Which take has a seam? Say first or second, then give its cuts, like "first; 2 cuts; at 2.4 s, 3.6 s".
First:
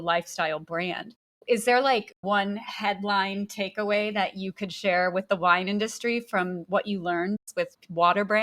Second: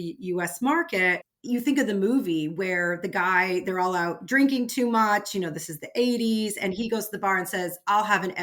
first; 3 cuts; at 1.3 s, 2.2 s, 7.4 s